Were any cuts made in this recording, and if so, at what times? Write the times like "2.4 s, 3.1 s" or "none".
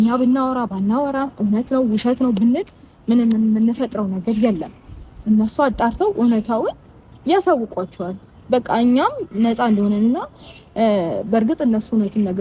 none

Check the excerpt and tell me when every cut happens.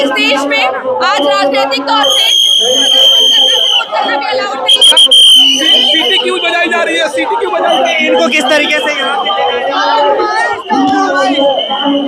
none

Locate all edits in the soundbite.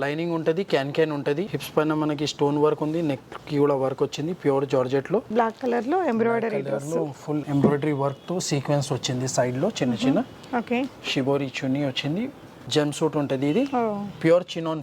5.3 s, 12.6 s

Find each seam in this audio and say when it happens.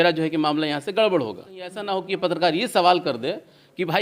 1.8 s

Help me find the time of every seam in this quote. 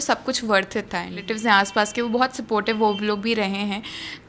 1.3 s

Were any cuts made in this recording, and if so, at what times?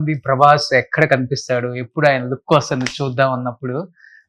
none

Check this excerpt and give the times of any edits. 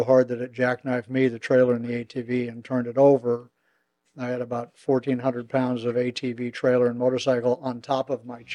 none

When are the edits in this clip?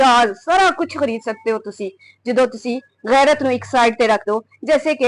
none

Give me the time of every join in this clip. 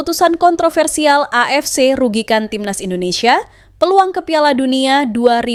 none

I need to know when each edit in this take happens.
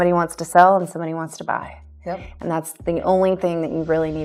none

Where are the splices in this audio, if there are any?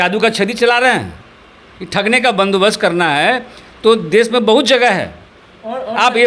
none

